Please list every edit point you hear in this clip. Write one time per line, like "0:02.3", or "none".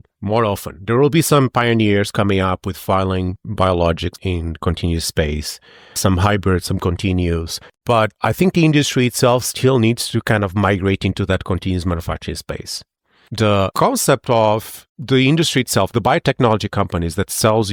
none

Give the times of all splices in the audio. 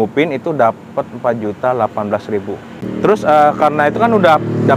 0:02.7

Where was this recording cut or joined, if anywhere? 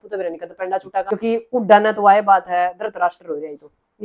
0:01.1

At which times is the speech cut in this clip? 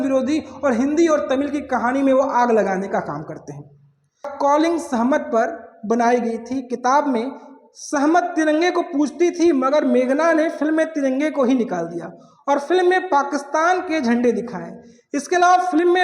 0:04.3

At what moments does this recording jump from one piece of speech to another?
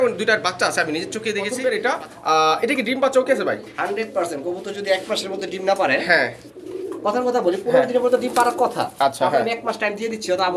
0:01.5

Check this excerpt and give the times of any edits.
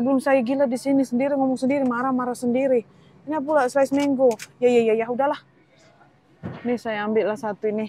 none

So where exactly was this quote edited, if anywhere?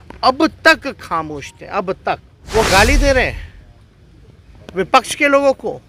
0:02.3

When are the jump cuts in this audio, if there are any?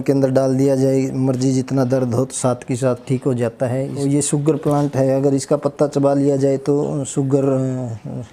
0:04.0

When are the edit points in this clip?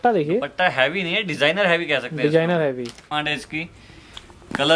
0:03.2

